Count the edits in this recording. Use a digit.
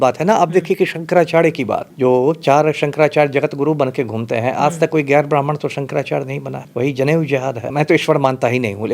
3